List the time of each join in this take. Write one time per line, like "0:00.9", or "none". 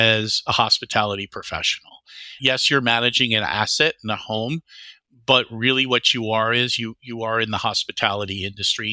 0:02.4